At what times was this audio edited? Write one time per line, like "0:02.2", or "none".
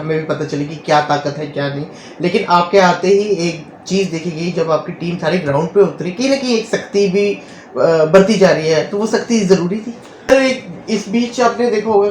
0:10.3